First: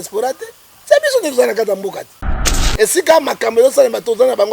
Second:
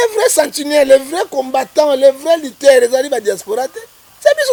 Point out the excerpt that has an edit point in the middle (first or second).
first